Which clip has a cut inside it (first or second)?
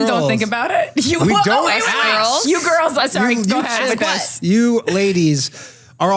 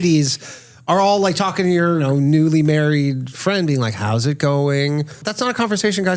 second